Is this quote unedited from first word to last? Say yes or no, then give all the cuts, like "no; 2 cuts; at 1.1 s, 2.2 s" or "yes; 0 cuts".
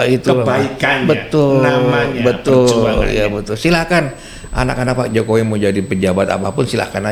yes; 0 cuts